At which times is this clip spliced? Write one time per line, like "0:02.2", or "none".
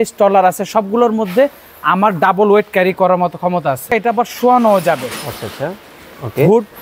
0:03.9